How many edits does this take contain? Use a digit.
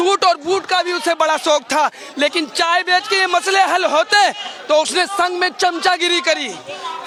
0